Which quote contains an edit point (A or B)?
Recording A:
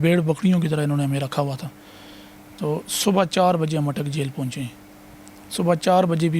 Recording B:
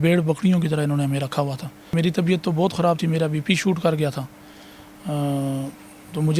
B